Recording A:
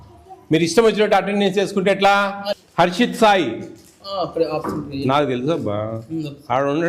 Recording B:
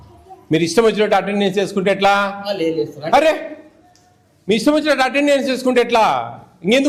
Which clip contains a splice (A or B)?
A